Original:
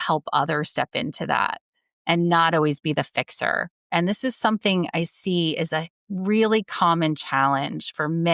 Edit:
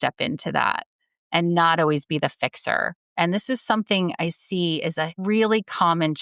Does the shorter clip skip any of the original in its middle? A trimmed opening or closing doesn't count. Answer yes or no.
yes